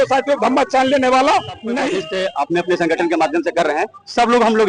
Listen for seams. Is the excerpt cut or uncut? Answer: cut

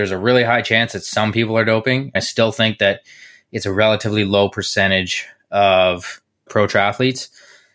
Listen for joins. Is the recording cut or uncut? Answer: cut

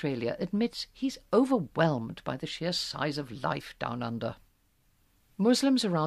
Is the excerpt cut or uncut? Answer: cut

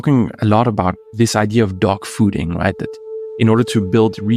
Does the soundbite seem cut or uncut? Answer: cut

